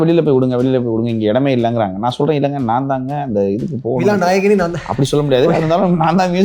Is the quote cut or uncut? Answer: uncut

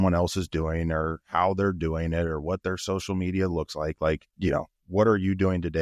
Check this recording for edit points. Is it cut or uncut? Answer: cut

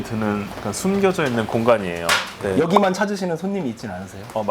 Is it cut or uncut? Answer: cut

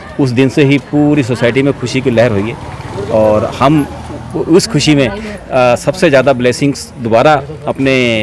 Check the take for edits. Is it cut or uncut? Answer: uncut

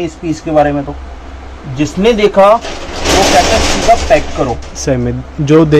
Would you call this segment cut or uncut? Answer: uncut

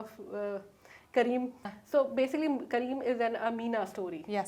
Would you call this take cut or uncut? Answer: cut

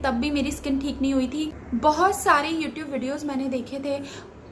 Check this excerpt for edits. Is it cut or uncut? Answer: uncut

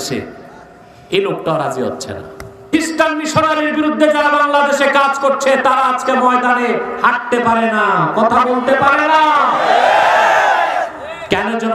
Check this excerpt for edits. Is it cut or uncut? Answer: cut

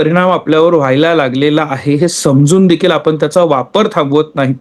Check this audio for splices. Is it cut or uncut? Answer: uncut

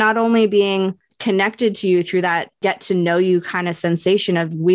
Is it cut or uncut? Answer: cut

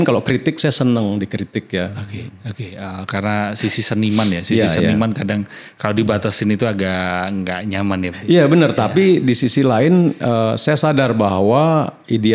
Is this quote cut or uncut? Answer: uncut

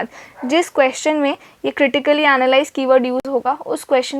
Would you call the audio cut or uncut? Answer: uncut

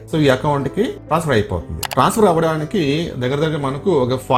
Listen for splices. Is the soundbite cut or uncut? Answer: uncut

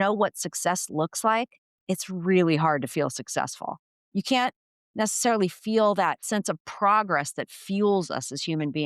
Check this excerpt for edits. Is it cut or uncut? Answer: cut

